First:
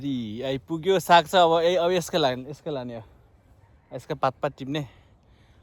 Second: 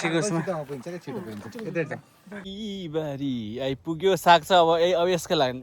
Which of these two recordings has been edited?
second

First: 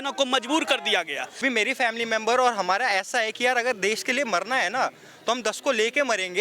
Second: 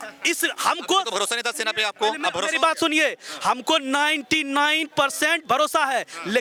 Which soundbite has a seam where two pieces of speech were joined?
first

